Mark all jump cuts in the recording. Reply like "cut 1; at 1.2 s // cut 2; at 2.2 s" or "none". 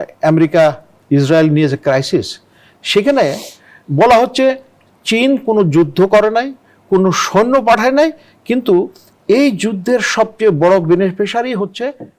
none